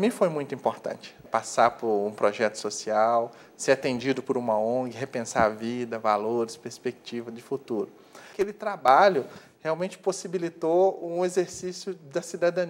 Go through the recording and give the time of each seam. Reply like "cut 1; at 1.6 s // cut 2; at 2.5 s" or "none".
cut 1; at 1.2 s // cut 2; at 8.3 s